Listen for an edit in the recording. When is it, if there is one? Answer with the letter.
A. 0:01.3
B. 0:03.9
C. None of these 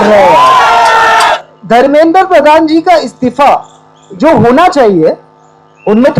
A